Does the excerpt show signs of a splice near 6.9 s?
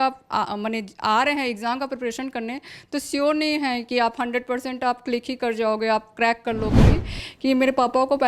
yes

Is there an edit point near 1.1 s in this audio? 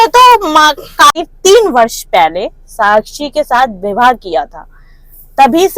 yes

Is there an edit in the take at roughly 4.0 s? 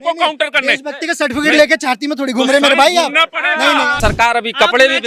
yes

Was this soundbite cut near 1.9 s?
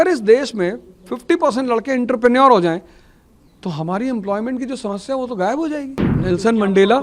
no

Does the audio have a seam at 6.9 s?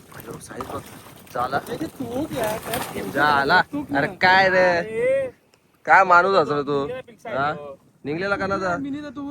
yes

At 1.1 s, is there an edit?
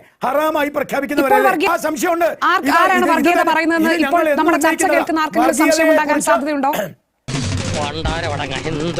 no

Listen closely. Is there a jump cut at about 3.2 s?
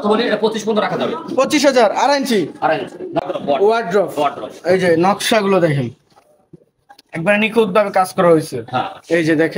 yes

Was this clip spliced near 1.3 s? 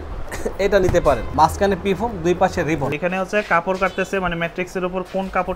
yes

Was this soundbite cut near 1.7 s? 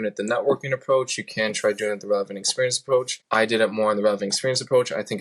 no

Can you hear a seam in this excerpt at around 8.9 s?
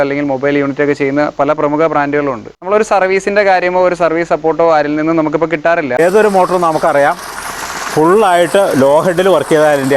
no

